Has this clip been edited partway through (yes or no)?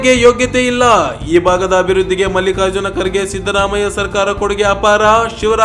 no